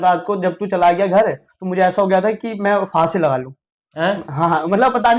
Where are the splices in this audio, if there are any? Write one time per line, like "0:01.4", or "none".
none